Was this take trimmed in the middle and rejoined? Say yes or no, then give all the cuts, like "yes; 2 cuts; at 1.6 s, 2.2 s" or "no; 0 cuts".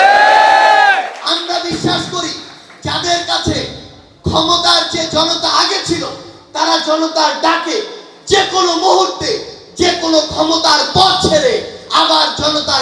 no; 0 cuts